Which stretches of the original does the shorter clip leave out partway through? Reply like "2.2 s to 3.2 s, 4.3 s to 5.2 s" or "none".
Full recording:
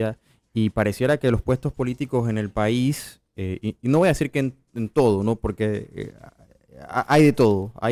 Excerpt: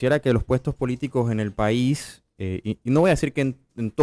none